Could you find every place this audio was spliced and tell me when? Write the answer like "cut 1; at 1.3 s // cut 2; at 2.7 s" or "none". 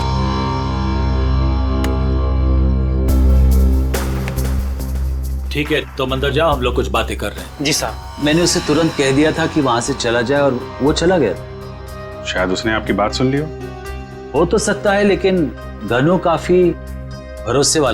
none